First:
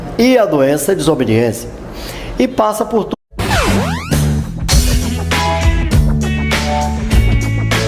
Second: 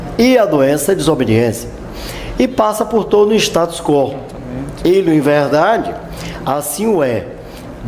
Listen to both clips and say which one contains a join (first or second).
second